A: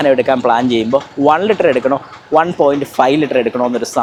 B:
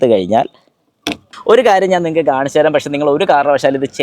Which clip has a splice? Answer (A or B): B